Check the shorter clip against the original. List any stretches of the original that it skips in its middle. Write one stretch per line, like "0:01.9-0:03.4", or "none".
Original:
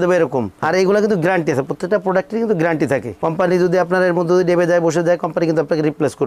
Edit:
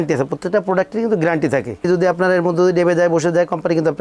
0:03.2-0:03.6